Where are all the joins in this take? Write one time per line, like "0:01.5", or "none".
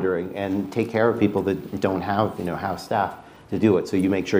none